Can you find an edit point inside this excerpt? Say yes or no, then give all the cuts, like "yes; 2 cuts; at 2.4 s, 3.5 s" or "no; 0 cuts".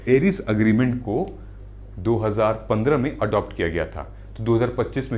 no; 0 cuts